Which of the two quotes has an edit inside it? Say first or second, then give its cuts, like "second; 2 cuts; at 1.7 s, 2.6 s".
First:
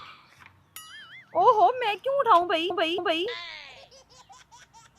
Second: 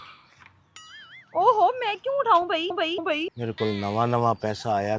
second; 1 cut; at 3.0 s